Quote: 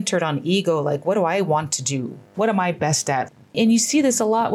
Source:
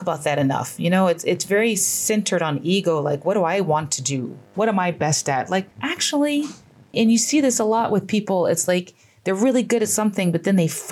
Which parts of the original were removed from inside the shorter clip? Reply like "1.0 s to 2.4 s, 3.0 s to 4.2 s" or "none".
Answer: 5.5 s to 6.7 s